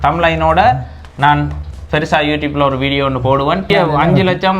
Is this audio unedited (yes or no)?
no